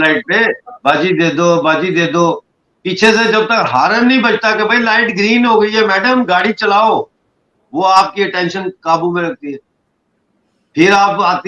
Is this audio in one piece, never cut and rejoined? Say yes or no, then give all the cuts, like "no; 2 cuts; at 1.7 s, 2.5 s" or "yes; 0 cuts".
yes; 0 cuts